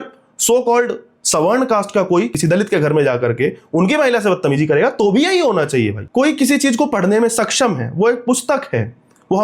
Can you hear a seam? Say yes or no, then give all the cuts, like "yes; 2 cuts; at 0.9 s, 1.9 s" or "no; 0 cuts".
yes; 2 cuts; at 2.3 s, 6.0 s